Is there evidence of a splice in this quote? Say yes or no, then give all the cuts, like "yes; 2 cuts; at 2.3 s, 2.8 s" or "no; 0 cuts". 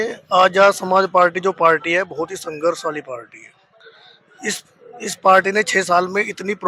no; 0 cuts